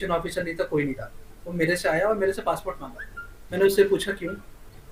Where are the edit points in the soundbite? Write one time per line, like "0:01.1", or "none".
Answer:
none